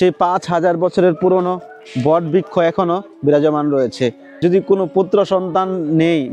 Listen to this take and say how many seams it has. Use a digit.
1